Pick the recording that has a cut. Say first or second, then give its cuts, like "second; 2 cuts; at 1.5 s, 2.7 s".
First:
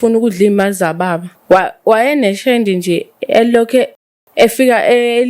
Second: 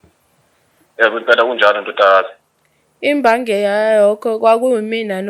first; 1 cut; at 1.3 s